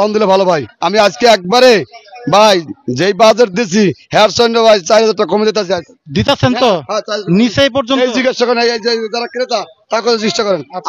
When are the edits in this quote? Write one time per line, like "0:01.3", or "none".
none

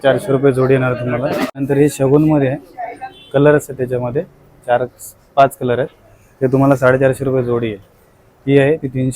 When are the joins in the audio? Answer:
0:01.6

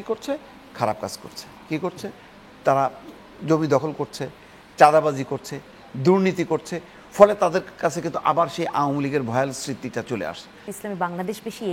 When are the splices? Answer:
0:10.7

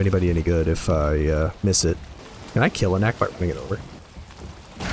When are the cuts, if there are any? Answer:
0:02.2

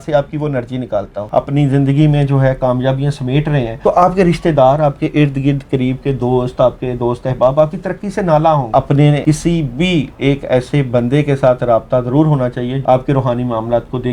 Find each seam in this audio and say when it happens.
0:01.2
0:03.7
0:09.0
0:12.8

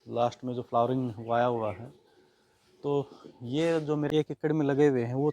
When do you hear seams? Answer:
0:04.1

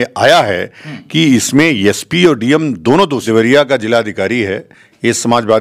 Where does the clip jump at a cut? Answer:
0:03.2

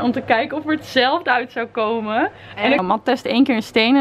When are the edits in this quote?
0:02.8

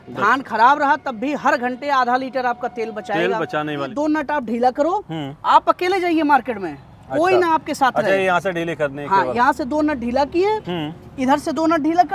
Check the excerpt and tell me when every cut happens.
0:03.9

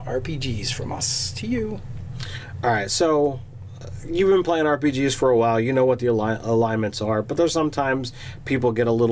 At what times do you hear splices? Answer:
0:06.7

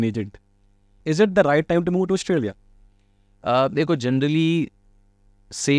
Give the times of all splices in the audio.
0:00.9

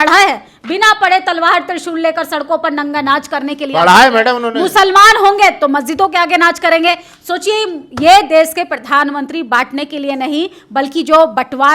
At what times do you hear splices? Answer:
none

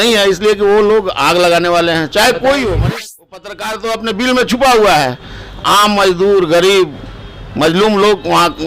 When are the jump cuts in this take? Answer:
0:02.8

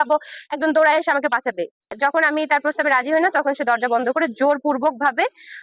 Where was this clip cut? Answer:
0:02.0

